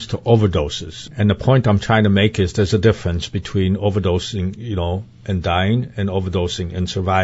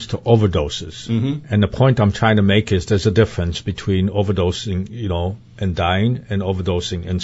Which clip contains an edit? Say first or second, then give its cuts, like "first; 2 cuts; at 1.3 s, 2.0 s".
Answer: first; 1 cut; at 1.0 s